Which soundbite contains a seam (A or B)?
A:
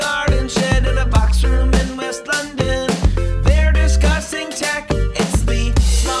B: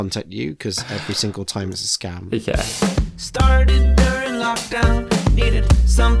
B